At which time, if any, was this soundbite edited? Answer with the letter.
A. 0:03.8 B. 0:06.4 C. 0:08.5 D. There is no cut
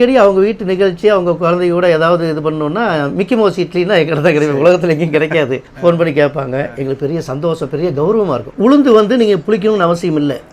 C